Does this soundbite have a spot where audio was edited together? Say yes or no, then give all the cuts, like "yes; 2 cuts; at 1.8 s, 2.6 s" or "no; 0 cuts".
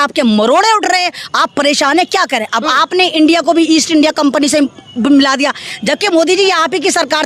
no; 0 cuts